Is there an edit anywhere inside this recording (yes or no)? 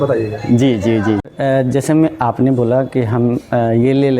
yes